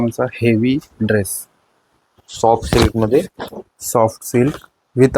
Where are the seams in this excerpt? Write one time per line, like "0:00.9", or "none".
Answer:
none

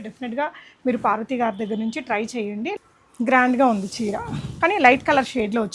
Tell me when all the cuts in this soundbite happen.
0:02.7

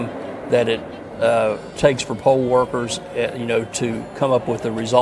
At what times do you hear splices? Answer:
0:01.7

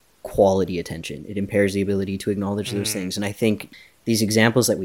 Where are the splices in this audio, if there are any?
0:03.7

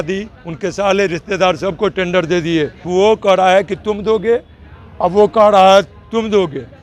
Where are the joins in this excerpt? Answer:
0:02.9

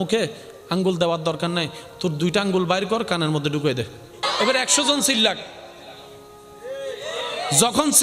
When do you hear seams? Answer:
0:04.2

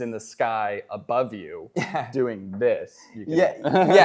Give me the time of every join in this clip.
none

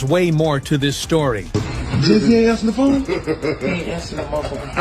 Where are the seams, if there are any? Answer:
0:01.4

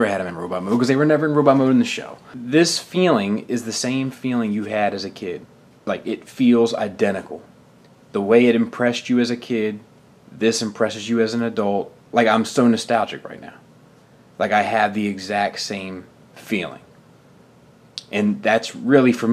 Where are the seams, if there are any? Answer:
0:07.2

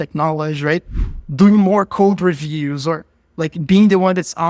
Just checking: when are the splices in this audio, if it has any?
0:01.0

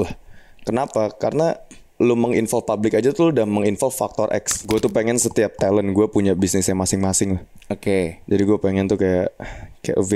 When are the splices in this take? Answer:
0:04.5

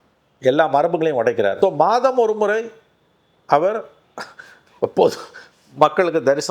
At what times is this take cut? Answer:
0:01.5

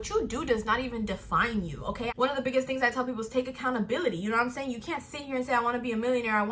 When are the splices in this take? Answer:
0:02.1

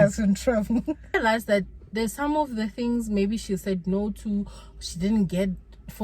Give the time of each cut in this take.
0:01.1

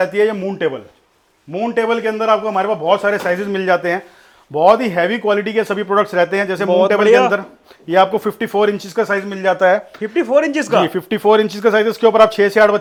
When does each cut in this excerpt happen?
none

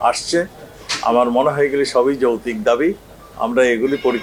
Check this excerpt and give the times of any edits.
none

